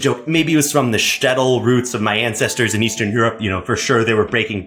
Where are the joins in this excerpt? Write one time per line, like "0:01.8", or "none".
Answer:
none